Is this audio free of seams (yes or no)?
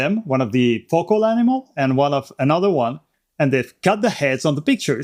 yes